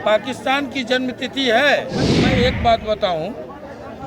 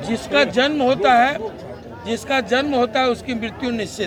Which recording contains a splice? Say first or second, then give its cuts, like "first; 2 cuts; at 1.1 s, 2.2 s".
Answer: first; 1 cut; at 2.1 s